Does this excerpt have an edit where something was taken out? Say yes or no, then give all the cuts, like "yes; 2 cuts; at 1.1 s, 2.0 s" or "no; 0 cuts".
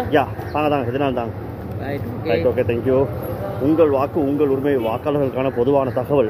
no; 0 cuts